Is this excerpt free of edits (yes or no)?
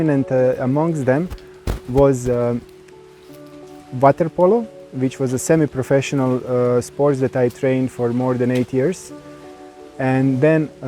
yes